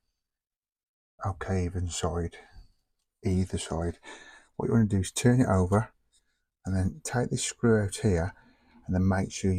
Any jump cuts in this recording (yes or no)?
no